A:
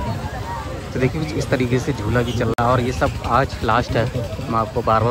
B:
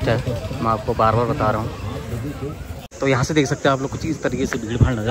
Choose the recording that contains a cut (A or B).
B